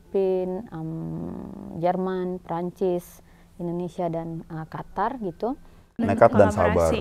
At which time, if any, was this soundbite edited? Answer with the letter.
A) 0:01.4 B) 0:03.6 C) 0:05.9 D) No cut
C